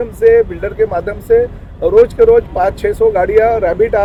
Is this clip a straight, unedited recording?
yes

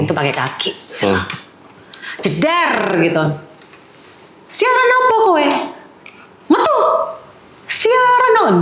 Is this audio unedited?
yes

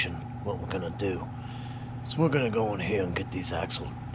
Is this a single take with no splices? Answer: yes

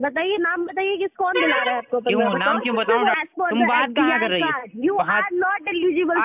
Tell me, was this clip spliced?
yes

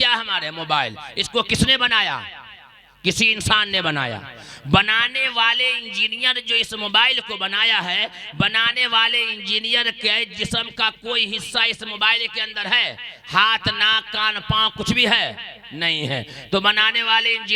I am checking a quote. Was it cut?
no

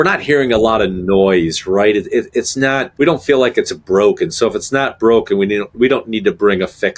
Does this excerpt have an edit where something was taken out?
no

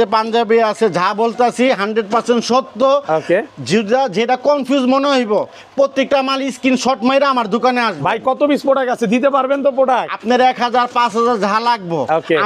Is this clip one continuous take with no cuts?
yes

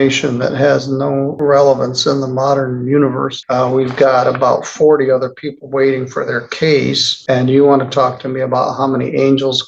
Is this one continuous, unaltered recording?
no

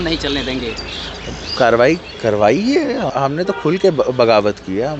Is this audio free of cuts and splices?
no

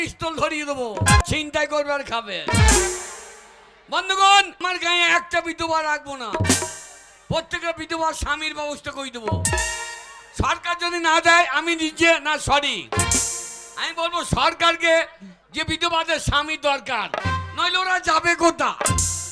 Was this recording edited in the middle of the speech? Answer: yes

